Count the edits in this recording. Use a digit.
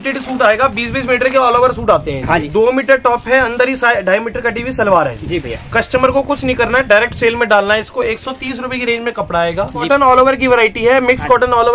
2